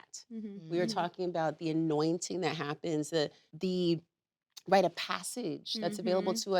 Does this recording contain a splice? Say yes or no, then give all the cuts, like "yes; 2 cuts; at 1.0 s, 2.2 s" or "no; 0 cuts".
yes; 1 cut; at 3.4 s